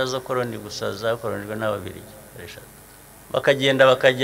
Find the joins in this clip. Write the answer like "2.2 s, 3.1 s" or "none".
3.0 s